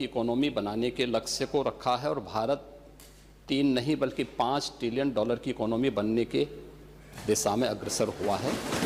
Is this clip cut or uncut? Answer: uncut